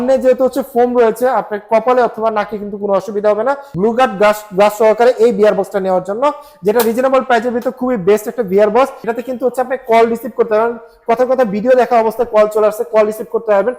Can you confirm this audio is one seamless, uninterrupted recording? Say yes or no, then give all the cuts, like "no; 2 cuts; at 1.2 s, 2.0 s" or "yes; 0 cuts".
no; 2 cuts; at 3.7 s, 9.1 s